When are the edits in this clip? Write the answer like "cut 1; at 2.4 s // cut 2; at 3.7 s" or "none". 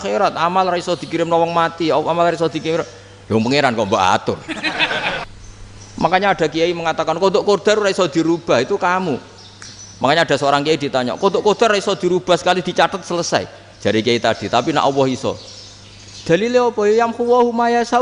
cut 1; at 5.3 s